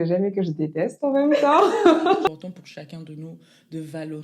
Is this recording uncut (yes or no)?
no